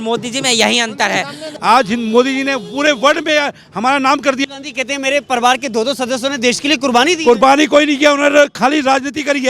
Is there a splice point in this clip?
yes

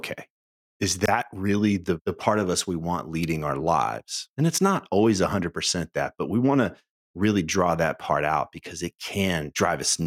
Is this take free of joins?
yes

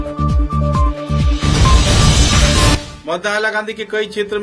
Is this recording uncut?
no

